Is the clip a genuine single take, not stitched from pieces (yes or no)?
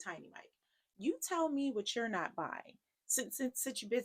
yes